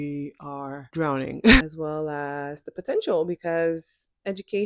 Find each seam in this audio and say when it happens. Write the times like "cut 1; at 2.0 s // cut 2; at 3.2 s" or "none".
cut 1; at 1.6 s